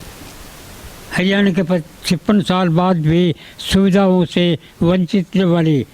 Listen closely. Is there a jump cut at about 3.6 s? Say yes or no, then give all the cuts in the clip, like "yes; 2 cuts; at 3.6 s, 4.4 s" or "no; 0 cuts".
no; 0 cuts